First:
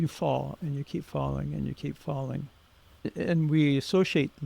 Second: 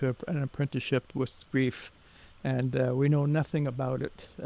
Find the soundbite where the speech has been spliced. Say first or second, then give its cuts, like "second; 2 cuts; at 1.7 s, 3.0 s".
first; 1 cut; at 3.1 s